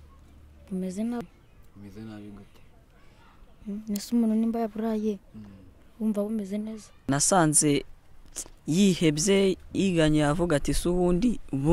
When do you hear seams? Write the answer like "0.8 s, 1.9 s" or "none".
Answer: 1.2 s, 7.1 s